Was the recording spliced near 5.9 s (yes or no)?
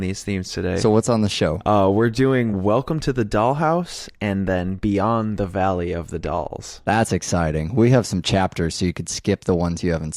yes